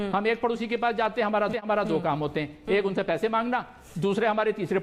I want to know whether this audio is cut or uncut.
uncut